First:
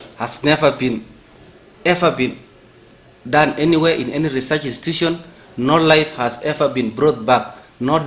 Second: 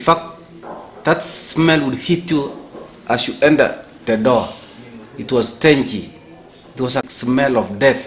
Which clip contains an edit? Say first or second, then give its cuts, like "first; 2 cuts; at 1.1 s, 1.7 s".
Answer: second; 1 cut; at 7.1 s